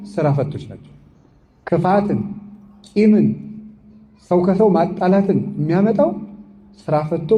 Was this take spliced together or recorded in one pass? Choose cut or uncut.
uncut